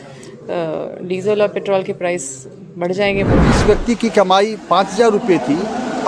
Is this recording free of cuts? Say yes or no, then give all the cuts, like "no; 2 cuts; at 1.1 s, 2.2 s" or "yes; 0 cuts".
no; 1 cut; at 3.4 s